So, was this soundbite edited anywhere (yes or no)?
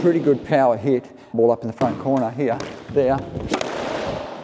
yes